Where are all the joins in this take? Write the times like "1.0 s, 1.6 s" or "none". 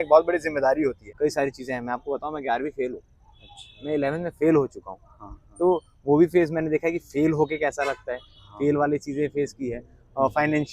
1.1 s